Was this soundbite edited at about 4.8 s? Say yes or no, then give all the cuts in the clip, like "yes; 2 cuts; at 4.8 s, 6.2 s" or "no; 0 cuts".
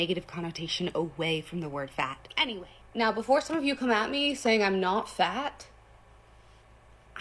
no; 1 cut; at 2.3 s